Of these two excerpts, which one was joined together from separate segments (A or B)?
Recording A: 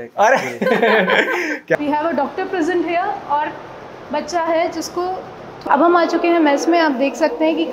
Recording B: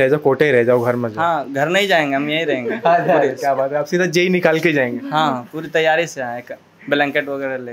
A